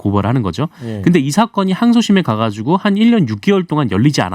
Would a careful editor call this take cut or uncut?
uncut